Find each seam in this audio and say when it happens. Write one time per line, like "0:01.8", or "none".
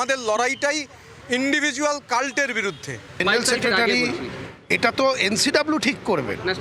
0:03.2